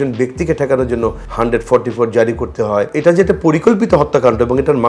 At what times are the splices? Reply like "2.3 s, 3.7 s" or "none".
1.2 s, 2.9 s